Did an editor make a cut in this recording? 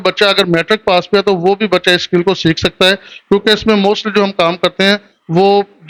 no; 0 cuts

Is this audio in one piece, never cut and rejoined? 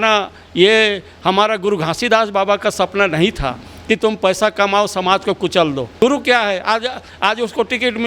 no; 1 cut; at 6.0 s

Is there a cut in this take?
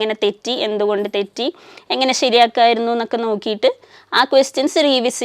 no; 0 cuts

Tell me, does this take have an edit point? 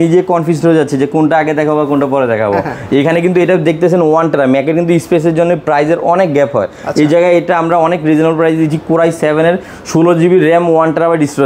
no; 0 cuts

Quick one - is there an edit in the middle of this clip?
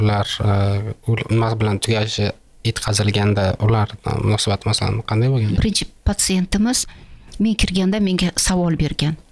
yes; 1 cut; at 5.5 s

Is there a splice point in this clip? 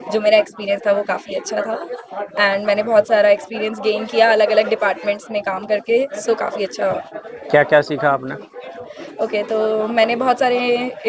no; 0 cuts

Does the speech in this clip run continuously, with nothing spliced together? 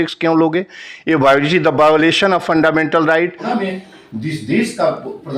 no; 1 cut; at 3.4 s

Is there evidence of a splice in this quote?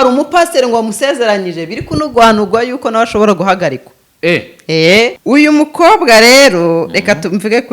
yes; 1 cut; at 5.2 s

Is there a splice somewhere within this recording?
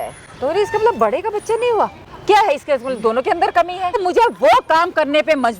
yes; 1 cut; at 3.9 s

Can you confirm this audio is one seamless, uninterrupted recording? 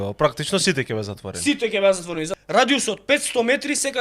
no; 1 cut; at 2.3 s

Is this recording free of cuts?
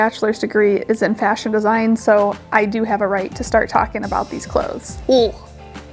no; 1 cut; at 4.9 s

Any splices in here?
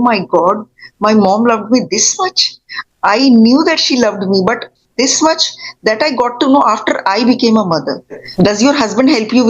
yes; 1 cut; at 8.2 s

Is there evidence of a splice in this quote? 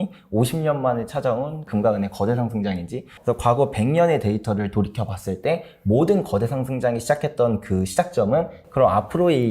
yes; 2 cuts; at 3.1 s, 8.6 s

